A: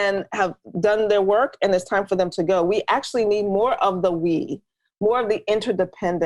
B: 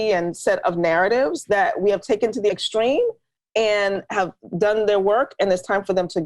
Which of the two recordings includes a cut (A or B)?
B